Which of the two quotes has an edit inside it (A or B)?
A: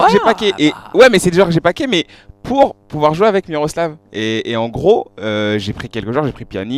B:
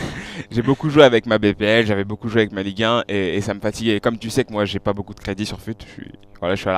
B